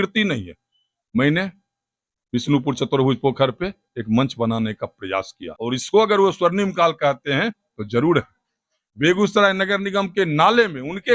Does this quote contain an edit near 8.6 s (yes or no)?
no